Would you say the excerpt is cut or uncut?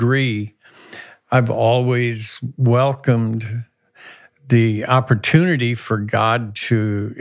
uncut